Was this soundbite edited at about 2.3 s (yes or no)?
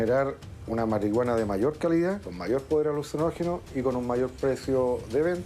yes